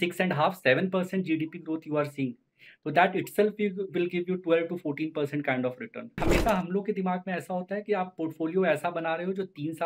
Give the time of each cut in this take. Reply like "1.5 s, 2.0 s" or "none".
6.2 s